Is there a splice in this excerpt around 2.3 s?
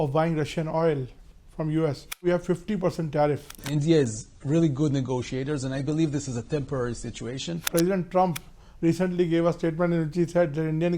yes; 3 cuts; at 2.3 s, 3.6 s, 7.7 s

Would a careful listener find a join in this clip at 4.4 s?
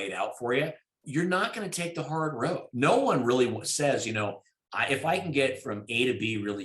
no; 2 cuts; at 1.0 s, 2.7 s

